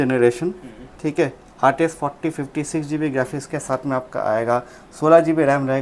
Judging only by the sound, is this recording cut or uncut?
uncut